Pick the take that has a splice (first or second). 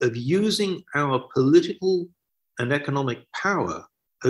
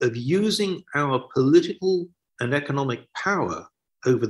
second